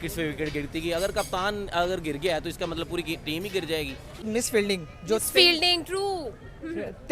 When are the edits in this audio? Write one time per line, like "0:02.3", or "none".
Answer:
0:04.2